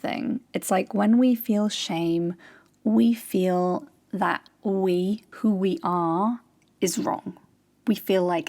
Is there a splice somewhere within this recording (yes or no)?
yes